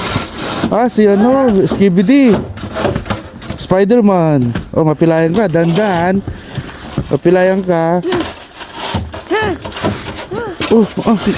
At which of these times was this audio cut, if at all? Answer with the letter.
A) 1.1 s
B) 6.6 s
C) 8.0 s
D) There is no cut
C